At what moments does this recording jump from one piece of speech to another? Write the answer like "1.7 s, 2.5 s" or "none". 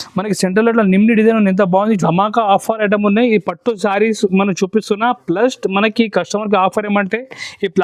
2.0 s